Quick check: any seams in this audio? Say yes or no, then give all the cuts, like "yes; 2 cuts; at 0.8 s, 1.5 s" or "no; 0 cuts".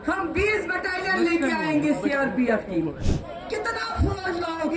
yes; 1 cut; at 3.1 s